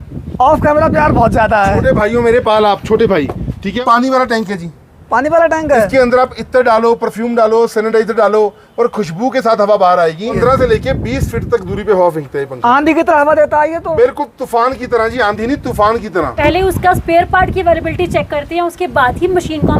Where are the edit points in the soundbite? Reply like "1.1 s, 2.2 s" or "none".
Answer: 3.8 s, 10.4 s, 16.3 s